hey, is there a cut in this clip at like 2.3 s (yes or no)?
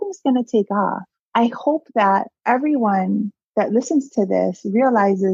yes